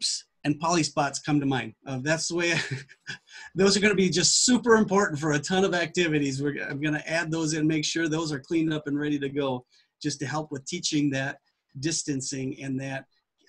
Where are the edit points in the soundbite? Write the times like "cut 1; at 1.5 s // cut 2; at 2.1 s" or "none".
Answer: none